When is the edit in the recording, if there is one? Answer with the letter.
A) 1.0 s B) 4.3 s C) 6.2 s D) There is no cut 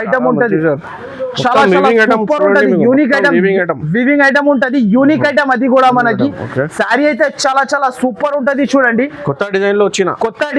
D